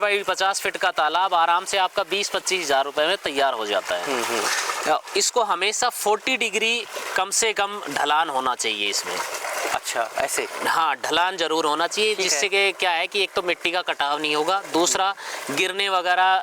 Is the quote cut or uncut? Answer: uncut